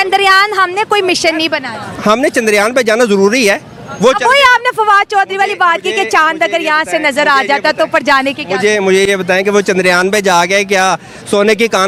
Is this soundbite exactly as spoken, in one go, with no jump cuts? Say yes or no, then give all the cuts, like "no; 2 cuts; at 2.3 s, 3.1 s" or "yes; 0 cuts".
yes; 0 cuts